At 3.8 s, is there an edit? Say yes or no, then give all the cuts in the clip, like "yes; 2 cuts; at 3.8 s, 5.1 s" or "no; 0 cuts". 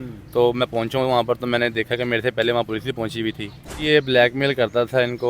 yes; 1 cut; at 3.8 s